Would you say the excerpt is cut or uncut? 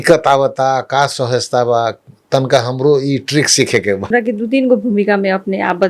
cut